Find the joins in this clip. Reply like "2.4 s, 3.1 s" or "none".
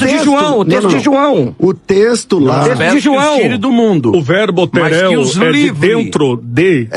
none